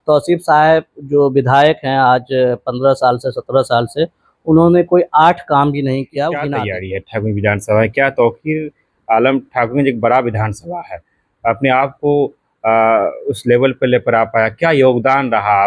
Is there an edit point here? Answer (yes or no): yes